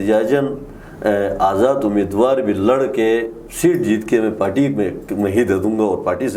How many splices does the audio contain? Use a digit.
0